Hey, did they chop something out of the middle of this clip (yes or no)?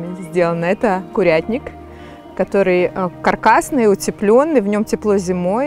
no